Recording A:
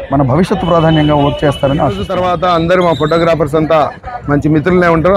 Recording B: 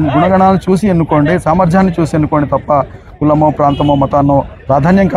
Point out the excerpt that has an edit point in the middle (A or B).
A